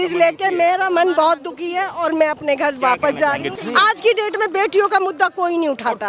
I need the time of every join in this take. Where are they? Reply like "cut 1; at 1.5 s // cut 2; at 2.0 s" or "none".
cut 1; at 3.5 s